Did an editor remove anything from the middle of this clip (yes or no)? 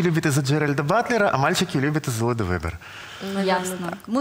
no